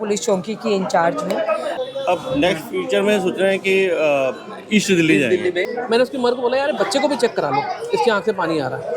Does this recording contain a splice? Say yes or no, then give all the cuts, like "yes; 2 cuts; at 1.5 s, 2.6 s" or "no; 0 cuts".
yes; 2 cuts; at 1.7 s, 5.7 s